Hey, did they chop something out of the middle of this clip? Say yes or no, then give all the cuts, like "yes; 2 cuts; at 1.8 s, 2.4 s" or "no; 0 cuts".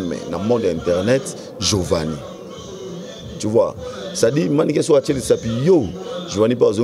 no; 0 cuts